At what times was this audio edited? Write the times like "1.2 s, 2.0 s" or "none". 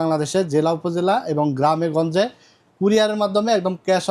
none

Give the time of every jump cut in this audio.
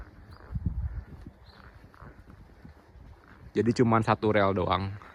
none

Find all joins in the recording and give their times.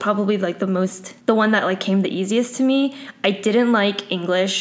1.1 s

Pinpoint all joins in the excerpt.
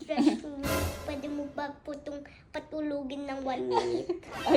1.0 s

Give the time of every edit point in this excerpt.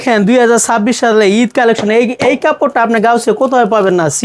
none

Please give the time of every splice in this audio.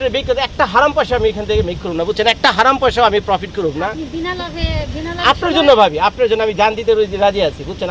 none

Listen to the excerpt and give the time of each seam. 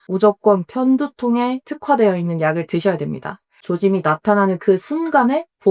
1.7 s, 3.6 s

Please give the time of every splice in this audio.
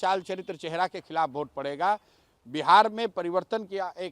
none

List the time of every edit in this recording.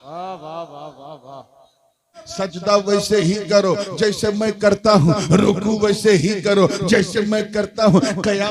2.2 s

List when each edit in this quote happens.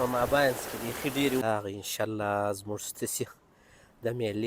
1.4 s

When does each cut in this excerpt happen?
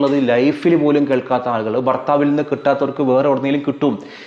none

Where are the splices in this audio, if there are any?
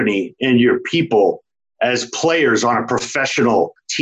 none

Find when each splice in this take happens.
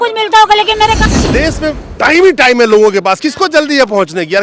1.1 s

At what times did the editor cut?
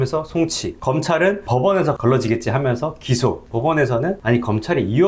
1.0 s, 3.4 s, 4.2 s

